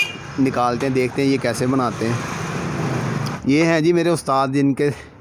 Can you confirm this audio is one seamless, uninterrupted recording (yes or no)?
no